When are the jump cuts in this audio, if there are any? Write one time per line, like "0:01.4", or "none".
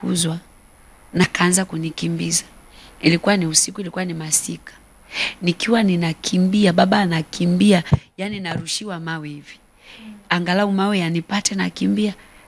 0:01.2